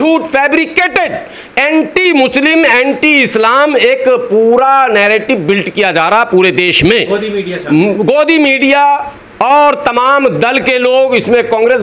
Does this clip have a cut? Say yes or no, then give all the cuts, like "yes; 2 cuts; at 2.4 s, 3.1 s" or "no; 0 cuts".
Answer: no; 0 cuts